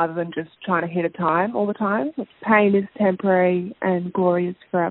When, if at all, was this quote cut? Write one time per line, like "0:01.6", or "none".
0:02.3